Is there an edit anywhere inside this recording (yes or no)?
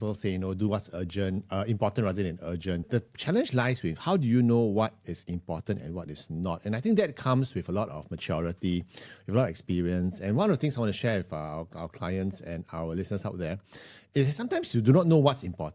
yes